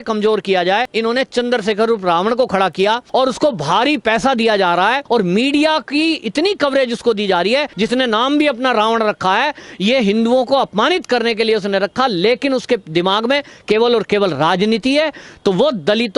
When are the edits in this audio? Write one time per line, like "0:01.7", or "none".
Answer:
0:00.9
0:03.0
0:05.0
0:07.7